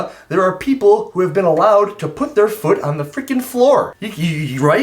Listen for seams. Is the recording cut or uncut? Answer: uncut